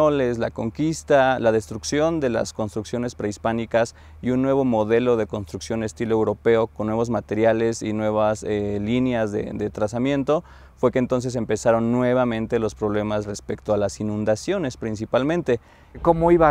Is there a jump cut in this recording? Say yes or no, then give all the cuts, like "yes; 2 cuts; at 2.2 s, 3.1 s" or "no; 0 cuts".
no; 0 cuts